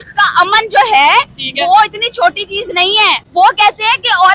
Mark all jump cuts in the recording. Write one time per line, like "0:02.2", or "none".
0:03.2